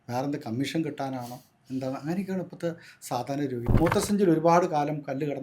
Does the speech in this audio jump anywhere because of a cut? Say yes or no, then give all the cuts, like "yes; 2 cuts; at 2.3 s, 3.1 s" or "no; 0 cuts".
yes; 1 cut; at 3.6 s